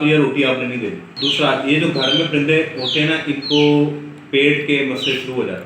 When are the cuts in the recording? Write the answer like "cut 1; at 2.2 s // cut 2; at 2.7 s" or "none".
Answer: cut 1; at 1.1 s